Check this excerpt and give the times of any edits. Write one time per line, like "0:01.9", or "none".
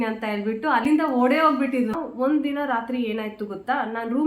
0:00.8
0:02.0